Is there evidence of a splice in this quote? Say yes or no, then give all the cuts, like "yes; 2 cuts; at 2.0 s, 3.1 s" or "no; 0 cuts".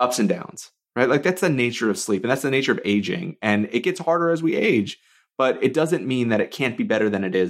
no; 0 cuts